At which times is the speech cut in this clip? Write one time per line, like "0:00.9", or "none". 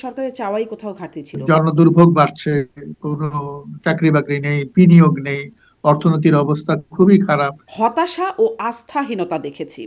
0:01.3
0:07.6